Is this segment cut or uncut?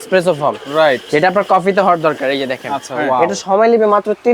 cut